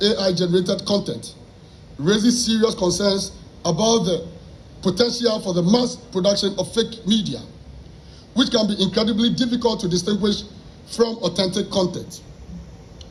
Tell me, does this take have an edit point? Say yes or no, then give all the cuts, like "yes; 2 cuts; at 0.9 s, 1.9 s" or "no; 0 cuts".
no; 0 cuts